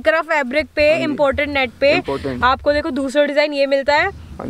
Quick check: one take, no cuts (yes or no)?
yes